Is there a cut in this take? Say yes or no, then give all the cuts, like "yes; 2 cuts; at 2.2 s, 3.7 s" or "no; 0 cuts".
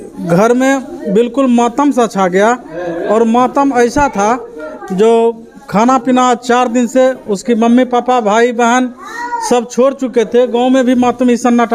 no; 0 cuts